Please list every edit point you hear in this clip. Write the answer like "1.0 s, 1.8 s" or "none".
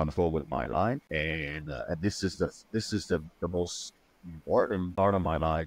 1.0 s, 4.9 s

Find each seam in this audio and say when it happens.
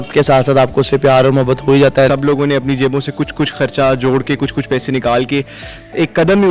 2.1 s

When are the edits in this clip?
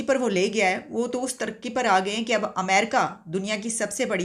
none

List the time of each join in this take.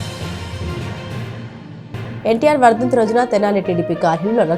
none

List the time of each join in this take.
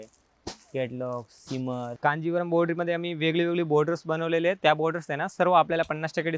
1.9 s

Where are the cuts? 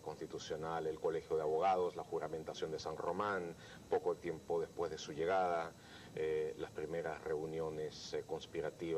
7.0 s

